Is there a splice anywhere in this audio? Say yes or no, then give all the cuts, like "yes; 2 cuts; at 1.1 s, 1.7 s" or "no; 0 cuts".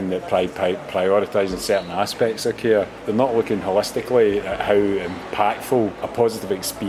yes; 2 cuts; at 3.0 s, 6.0 s